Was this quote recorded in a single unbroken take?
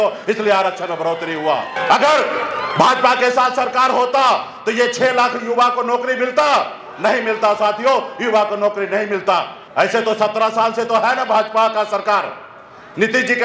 no; 2 cuts; at 1.7 s, 9.6 s

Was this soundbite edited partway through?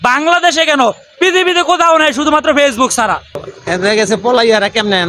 yes; 1 cut; at 3.5 s

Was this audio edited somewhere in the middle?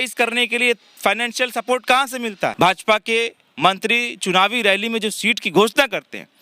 yes; 1 cut; at 2.5 s

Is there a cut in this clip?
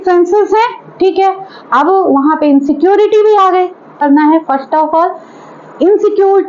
yes; 1 cut; at 4.0 s

